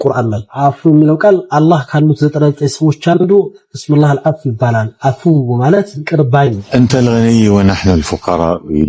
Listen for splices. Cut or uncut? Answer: cut